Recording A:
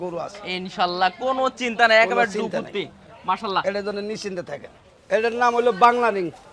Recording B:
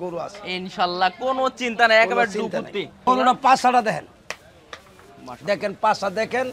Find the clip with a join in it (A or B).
B